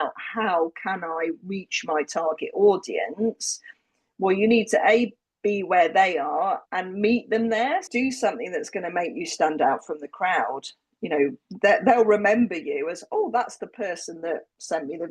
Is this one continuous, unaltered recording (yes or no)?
no